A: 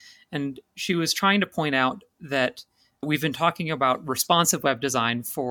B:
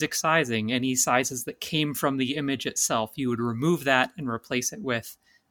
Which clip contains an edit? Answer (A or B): A